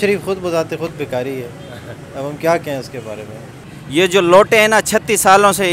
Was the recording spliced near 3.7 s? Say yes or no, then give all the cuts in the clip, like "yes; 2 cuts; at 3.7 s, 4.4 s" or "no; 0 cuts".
yes; 1 cut; at 3.7 s